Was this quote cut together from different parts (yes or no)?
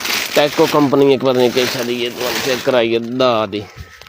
no